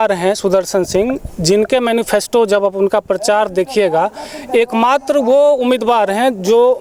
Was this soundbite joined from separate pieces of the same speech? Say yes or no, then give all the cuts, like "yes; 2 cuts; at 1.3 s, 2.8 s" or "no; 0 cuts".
no; 0 cuts